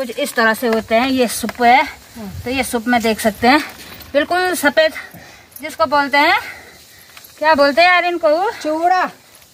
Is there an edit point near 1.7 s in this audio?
no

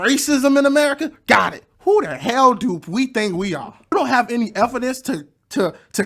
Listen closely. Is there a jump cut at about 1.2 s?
no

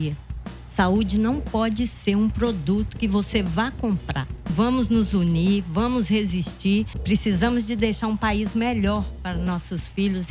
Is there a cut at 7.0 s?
yes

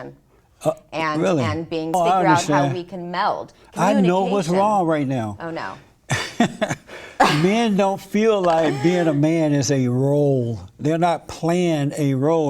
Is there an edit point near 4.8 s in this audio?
no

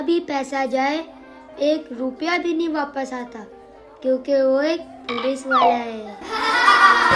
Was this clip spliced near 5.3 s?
no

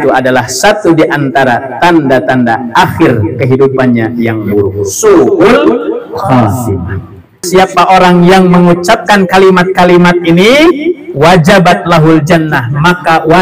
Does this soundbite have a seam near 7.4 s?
yes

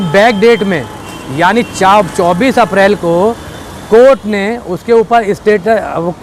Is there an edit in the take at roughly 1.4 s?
no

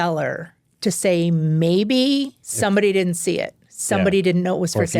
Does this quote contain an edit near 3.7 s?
no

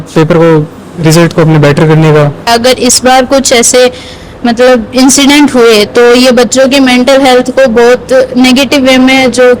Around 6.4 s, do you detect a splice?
no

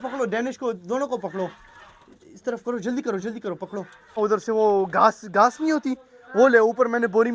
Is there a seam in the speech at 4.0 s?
yes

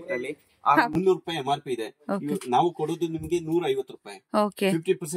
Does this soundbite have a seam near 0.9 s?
yes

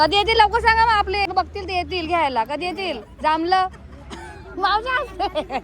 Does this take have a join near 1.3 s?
yes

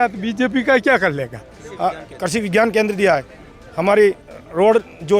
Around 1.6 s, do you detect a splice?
yes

